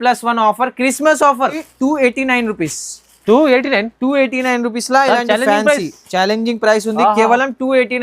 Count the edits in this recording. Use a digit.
1